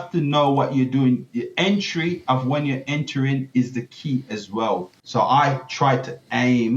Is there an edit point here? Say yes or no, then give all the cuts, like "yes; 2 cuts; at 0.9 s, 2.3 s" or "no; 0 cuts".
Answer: yes; 1 cut; at 5.0 s